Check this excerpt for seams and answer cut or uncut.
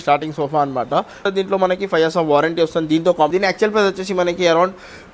cut